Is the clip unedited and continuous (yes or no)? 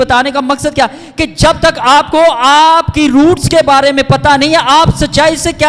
yes